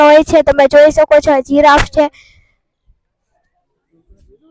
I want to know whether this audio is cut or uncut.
uncut